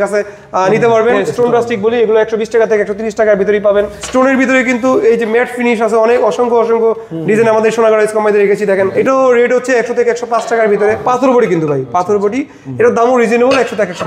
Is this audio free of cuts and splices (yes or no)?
no